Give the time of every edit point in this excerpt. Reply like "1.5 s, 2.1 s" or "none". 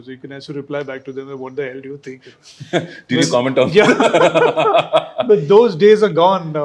none